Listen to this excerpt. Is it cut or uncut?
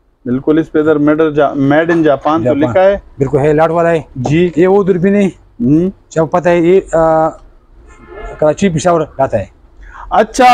uncut